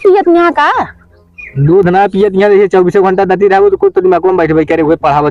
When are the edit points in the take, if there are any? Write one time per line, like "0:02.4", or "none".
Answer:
none